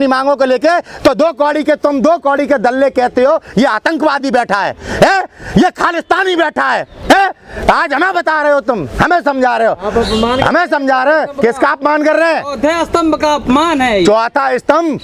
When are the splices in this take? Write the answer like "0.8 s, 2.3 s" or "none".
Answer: none